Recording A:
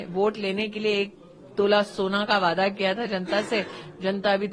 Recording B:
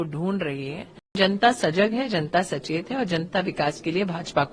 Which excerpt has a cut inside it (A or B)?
B